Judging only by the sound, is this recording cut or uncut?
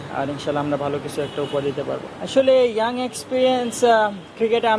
uncut